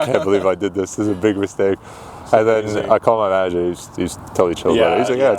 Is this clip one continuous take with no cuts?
yes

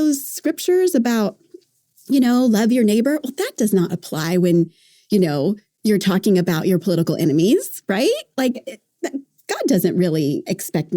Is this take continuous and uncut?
yes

